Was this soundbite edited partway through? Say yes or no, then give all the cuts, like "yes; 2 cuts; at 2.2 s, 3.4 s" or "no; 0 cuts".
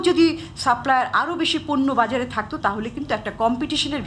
no; 0 cuts